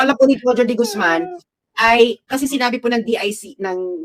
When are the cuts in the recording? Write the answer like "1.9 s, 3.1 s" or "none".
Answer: none